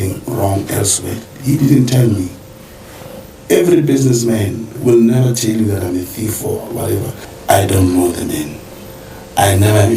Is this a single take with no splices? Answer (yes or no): no